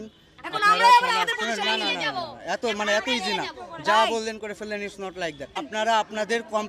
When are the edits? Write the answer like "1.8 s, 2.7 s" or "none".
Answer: 5.7 s